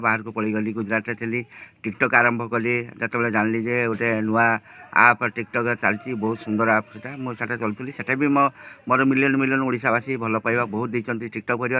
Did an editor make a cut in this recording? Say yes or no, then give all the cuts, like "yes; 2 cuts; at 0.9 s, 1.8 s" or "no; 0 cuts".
no; 0 cuts